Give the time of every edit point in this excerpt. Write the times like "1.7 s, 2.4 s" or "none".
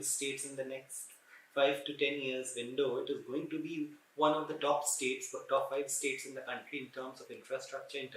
none